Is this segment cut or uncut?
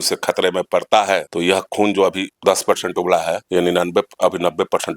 cut